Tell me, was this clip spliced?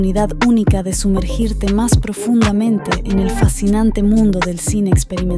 no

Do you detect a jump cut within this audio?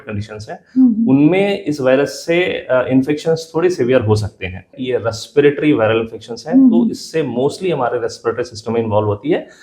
yes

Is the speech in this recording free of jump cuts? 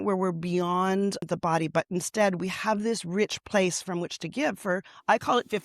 no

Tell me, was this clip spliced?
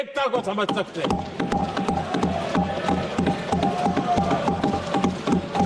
no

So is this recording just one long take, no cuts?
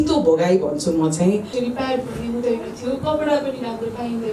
no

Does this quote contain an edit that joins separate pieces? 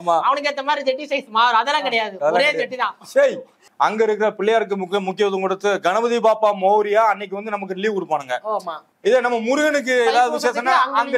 yes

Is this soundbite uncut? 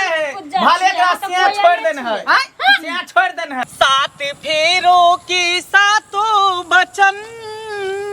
no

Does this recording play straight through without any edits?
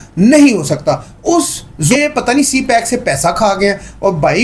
no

